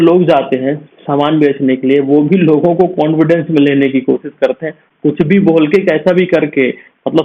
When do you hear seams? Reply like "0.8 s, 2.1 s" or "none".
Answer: none